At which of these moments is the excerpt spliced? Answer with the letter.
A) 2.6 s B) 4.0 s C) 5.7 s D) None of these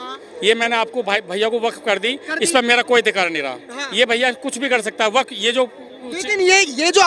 D